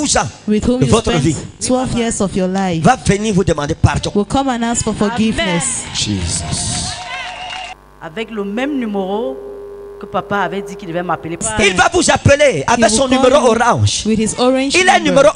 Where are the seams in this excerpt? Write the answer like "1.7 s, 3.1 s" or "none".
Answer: 7.8 s, 11.5 s